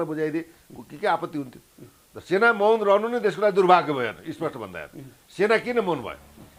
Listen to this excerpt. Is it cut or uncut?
uncut